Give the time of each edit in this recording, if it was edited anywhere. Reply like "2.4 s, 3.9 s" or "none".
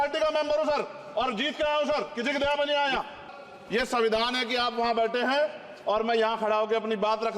3.3 s